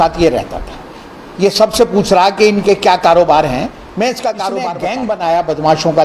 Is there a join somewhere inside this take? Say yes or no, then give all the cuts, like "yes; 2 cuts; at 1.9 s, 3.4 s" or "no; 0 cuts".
yes; 1 cut; at 4.8 s